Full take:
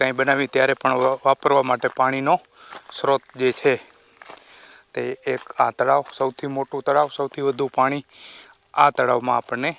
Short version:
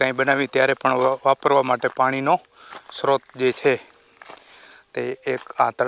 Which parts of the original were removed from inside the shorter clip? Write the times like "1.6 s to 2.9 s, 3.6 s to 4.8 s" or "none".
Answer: none